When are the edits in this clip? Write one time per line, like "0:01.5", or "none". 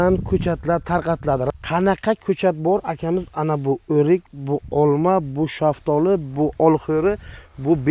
0:01.5